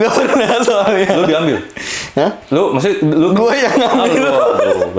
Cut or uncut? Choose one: uncut